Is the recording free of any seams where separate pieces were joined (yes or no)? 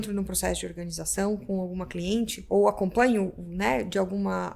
no